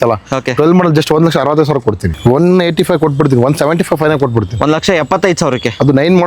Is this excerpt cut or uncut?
cut